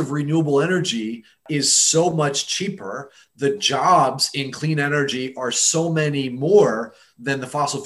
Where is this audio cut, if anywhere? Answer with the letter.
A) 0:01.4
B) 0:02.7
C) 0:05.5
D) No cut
A